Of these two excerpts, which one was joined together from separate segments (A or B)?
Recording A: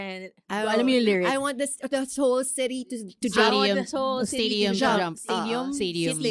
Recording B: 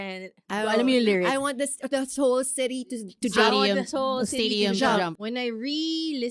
B